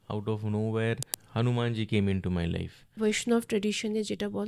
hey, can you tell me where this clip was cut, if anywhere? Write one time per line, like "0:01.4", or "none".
0:01.1
0:02.9